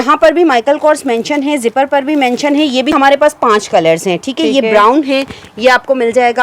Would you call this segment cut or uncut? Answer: cut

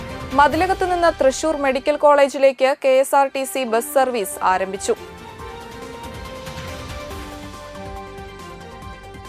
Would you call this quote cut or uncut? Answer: uncut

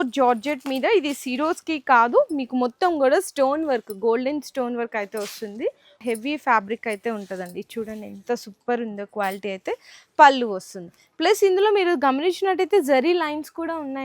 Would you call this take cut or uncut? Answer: cut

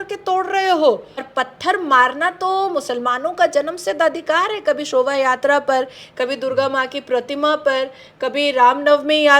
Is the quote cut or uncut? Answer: cut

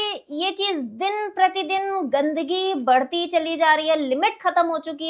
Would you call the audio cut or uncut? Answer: uncut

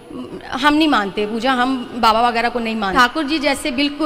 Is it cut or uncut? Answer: cut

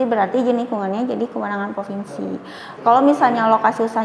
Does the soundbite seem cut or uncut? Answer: cut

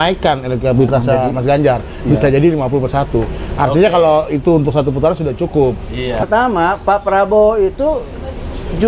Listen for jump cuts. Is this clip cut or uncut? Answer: cut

